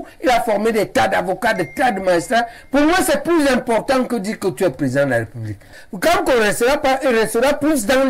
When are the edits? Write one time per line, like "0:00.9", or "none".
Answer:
0:05.8